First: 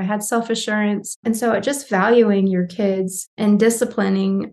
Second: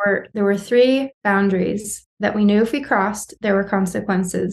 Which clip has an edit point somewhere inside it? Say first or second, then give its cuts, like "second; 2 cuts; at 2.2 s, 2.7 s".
first; 2 cuts; at 1.2 s, 3.3 s